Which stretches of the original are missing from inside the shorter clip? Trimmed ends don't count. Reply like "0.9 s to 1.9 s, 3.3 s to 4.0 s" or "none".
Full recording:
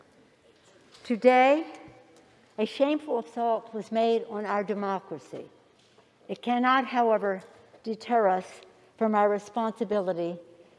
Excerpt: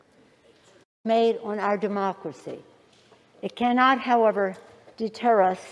0.9 s to 3.8 s